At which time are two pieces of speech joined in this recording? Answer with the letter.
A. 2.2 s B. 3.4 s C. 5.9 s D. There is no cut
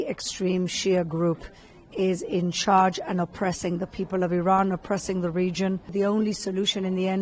C